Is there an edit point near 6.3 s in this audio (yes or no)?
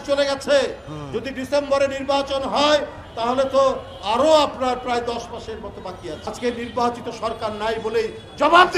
yes